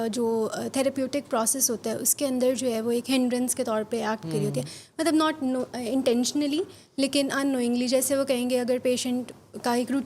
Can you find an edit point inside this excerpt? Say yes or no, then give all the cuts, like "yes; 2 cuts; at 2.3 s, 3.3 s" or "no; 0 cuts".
no; 0 cuts